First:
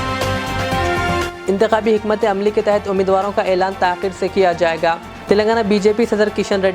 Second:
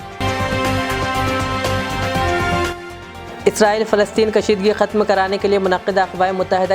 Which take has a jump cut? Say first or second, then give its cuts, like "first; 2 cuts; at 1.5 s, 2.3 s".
first; 1 cut; at 1.3 s